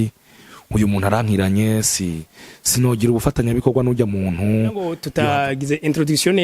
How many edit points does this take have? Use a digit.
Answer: 1